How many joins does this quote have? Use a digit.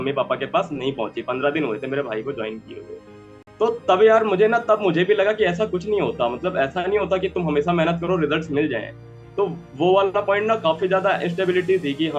0